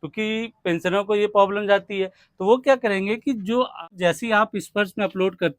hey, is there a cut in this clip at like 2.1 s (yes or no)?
no